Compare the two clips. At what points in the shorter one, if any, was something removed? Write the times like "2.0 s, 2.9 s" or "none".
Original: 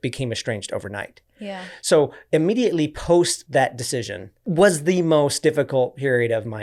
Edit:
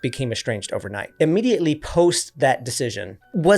1.1 s